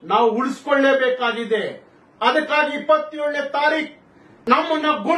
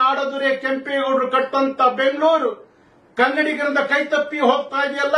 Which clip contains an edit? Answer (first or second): first